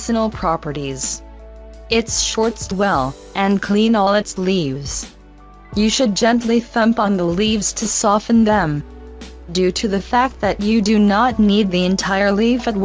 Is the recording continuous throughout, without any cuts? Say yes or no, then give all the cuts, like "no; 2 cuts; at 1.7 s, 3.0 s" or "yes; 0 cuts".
yes; 0 cuts